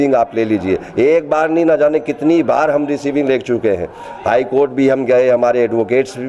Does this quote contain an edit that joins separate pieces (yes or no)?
no